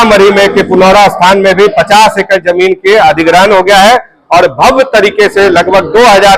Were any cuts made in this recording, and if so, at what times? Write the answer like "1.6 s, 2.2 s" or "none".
none